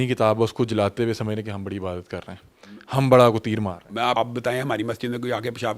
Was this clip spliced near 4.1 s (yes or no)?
yes